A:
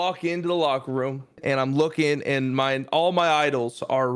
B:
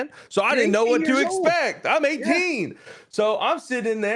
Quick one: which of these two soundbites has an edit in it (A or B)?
A